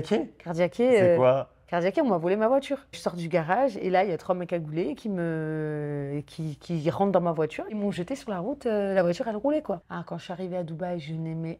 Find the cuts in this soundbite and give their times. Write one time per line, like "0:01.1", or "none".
0:03.0
0:07.7
0:09.9